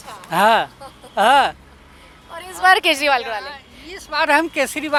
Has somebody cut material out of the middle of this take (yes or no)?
no